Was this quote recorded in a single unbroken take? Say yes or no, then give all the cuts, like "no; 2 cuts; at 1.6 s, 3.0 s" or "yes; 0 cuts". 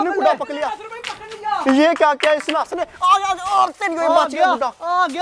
yes; 0 cuts